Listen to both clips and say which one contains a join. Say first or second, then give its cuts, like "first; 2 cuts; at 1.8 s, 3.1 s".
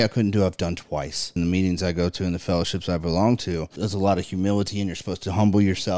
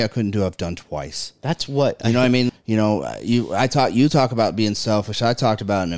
first; 2 cuts; at 1.3 s, 3.7 s